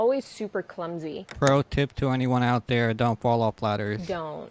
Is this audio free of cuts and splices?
no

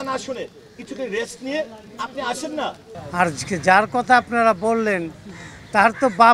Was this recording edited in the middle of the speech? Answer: yes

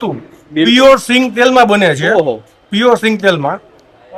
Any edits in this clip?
no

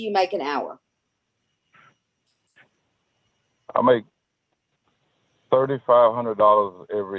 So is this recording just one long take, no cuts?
yes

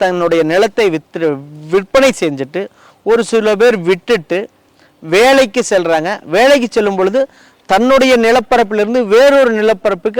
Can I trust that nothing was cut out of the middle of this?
yes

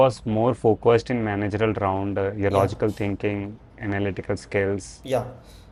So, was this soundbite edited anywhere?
no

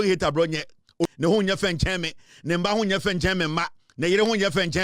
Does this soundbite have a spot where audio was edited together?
yes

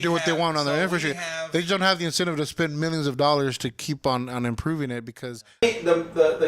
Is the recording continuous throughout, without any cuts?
no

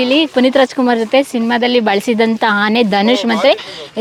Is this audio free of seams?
yes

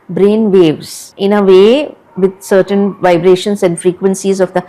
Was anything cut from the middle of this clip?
no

